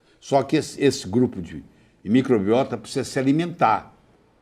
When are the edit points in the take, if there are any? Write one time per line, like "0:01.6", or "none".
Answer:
none